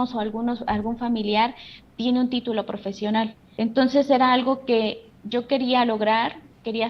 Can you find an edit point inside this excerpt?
yes; 1 cut; at 3.4 s

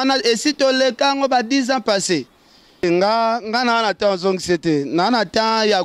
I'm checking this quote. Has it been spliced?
yes; 1 cut; at 2.8 s

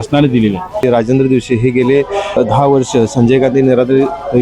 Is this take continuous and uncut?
no; 2 cuts; at 0.8 s, 2.4 s

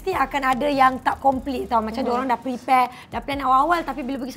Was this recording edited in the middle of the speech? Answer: no; 0 cuts

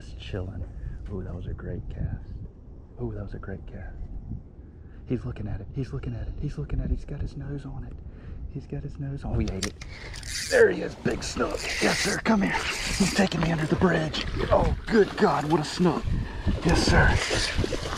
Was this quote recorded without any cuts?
yes; 0 cuts

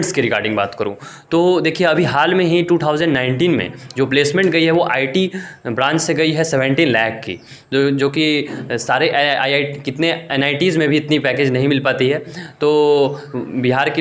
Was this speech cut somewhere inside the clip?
no; 0 cuts

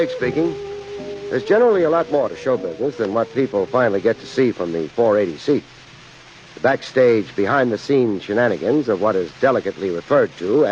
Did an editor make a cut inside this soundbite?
yes; 1 cut; at 4.7 s

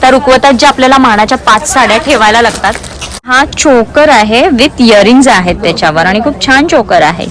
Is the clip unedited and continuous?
no; 1 cut; at 3.3 s

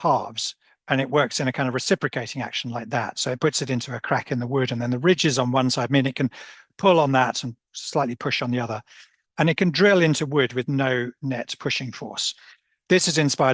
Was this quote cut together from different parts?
no; 0 cuts

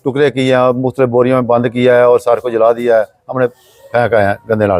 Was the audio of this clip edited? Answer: no; 0 cuts

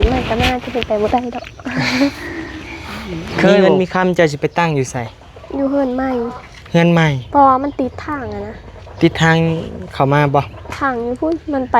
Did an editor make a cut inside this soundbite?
yes; 1 cut; at 3.6 s

